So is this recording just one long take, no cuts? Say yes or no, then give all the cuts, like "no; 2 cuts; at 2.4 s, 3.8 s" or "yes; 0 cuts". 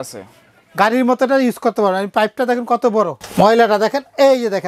no; 1 cut; at 3.2 s